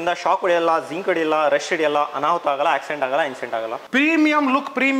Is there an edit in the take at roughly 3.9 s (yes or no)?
yes